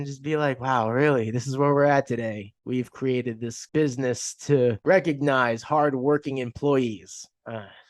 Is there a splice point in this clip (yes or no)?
yes